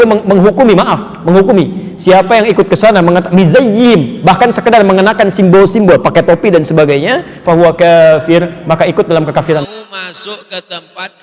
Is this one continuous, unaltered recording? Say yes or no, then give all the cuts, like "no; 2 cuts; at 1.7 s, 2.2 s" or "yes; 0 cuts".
no; 1 cut; at 9.6 s